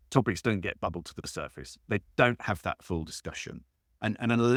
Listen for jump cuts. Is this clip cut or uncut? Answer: uncut